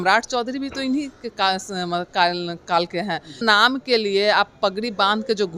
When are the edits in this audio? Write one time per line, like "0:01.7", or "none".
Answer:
0:03.4